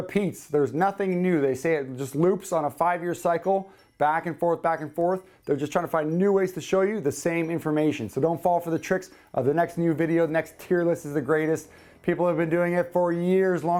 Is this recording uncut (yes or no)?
yes